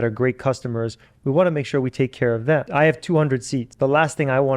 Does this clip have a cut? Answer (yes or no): yes